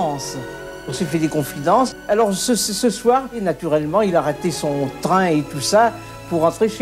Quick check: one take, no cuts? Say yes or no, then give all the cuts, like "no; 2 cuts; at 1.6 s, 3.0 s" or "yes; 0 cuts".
no; 1 cut; at 3.3 s